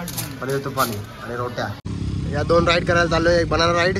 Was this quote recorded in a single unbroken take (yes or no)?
no